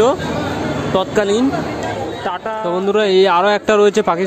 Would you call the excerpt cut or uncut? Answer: cut